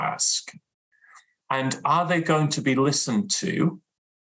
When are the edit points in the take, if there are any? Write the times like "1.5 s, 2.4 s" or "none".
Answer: none